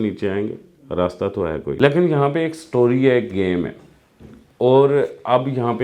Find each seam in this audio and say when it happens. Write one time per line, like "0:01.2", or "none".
0:01.8